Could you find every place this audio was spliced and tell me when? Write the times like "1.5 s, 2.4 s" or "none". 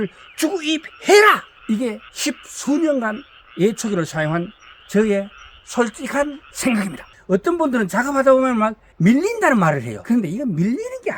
7.1 s, 8.8 s, 9.9 s